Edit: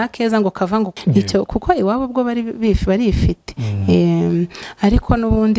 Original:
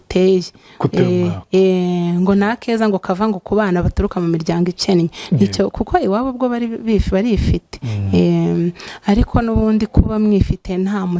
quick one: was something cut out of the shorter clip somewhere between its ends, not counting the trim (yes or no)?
yes